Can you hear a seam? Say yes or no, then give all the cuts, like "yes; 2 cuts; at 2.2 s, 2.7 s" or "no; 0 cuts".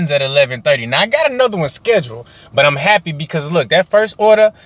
no; 0 cuts